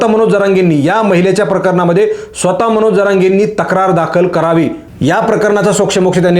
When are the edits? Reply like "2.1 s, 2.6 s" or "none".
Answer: 4.9 s